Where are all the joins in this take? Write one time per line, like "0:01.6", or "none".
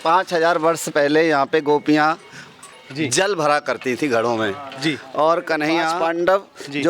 0:05.9

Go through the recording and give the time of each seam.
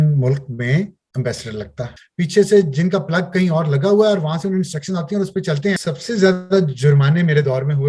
0:02.0
0:05.8

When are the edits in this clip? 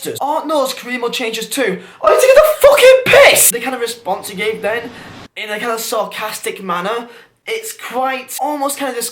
0:03.5

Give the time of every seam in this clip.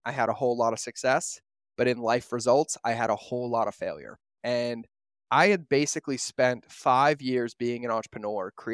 none

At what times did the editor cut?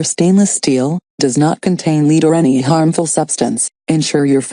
0:01.5

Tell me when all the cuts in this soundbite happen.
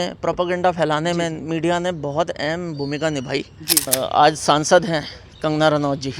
0:03.9

